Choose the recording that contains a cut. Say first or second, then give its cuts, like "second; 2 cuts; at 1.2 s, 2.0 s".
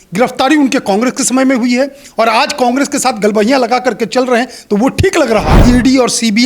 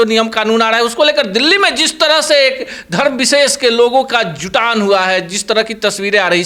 first; 1 cut; at 5.5 s